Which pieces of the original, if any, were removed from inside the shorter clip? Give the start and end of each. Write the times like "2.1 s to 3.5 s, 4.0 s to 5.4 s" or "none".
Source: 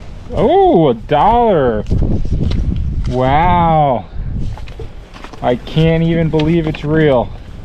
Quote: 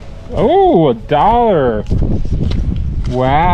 none